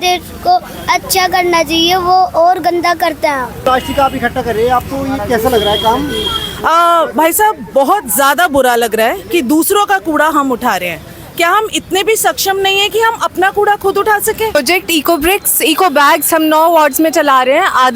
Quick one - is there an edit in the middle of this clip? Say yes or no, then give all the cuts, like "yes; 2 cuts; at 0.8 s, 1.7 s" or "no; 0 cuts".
yes; 2 cuts; at 3.5 s, 14.5 s